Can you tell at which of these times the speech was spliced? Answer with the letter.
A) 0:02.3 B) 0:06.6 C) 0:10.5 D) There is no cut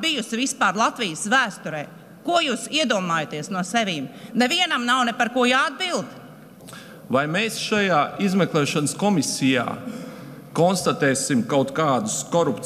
D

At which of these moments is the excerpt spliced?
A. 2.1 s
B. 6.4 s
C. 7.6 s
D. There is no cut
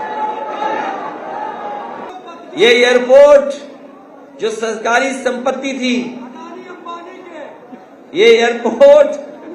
A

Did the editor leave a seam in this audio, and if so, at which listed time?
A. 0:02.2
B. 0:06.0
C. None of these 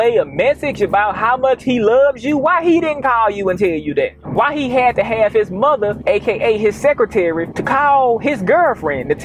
B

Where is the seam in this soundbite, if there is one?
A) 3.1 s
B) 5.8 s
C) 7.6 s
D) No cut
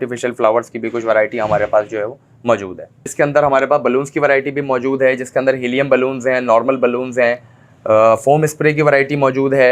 A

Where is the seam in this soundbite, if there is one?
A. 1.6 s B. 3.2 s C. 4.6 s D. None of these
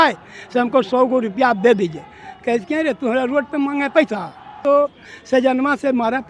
C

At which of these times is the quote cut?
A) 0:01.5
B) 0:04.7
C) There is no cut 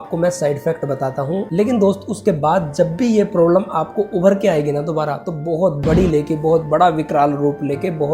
A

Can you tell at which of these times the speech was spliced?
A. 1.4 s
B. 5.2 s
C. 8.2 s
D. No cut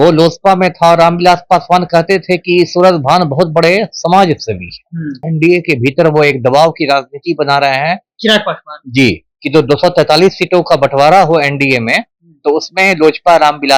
B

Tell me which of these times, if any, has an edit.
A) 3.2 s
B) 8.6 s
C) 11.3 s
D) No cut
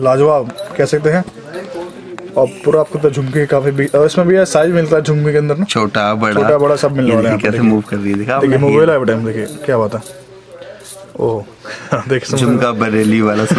D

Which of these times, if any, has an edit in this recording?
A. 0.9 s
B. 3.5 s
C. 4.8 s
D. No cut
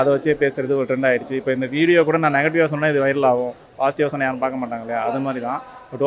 D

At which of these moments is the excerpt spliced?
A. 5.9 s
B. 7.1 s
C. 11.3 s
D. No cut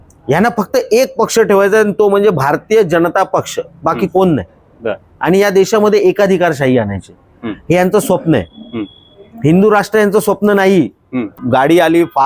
C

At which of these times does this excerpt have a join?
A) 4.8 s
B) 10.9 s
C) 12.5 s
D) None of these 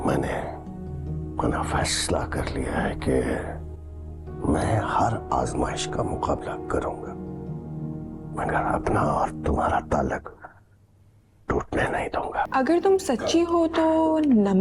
C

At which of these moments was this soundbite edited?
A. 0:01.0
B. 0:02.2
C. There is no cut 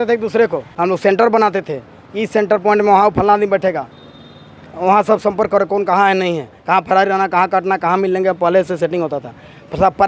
A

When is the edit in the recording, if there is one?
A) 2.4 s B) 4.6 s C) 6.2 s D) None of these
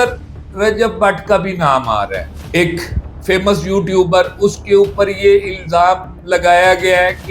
A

